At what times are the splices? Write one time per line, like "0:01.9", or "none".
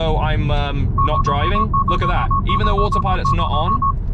none